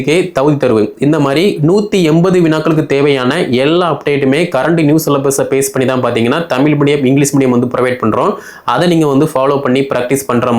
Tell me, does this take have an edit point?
no; 0 cuts

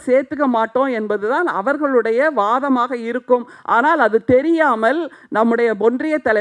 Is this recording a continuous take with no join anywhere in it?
yes; 0 cuts

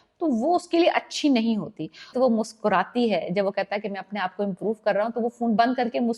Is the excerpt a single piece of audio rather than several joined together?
no; 1 cut; at 2.1 s

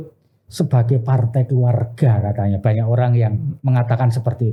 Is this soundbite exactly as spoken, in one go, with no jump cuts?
yes; 0 cuts

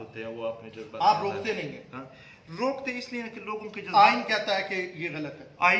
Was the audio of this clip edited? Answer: yes; 1 cut; at 4.1 s

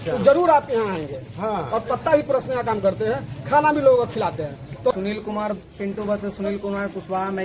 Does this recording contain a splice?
yes; 1 cut; at 4.9 s

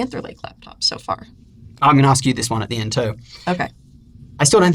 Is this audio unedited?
yes; 0 cuts

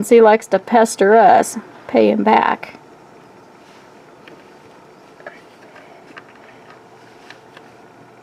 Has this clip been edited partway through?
no; 0 cuts

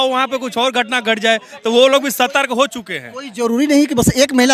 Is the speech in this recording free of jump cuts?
yes; 0 cuts

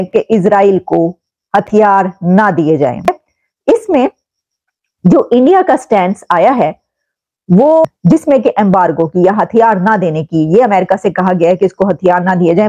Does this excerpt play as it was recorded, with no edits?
no; 1 cut; at 3.0 s

